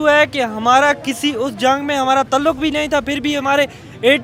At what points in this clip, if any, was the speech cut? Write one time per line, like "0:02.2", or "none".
none

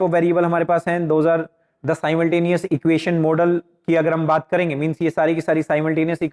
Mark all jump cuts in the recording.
none

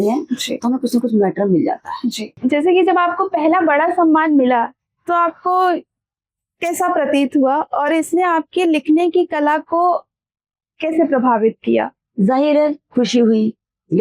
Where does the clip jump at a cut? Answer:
0:02.3

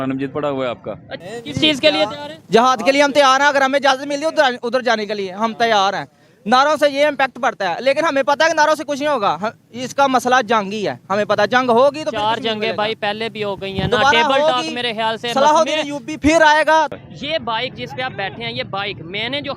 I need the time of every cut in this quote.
0:01.1
0:16.9

